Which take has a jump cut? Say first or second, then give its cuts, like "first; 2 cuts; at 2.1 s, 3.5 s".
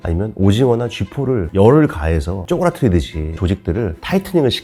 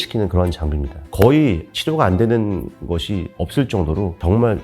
second; 1 cut; at 1.0 s